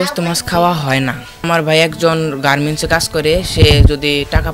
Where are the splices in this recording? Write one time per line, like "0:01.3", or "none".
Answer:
0:01.5